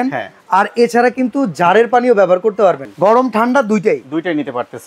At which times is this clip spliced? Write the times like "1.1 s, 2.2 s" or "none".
2.9 s

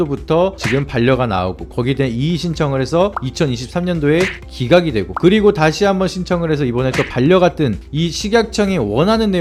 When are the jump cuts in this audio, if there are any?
none

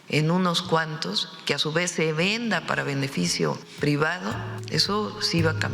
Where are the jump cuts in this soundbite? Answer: 3.7 s, 4.5 s

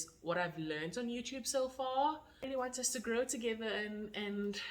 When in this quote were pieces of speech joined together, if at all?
2.4 s

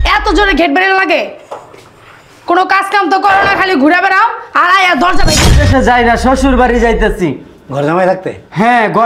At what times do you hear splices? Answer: 5.5 s

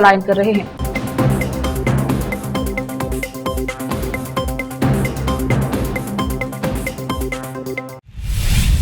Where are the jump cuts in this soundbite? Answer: 7.9 s

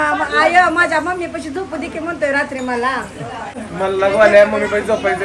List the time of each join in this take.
3.5 s

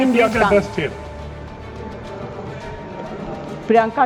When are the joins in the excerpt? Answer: none

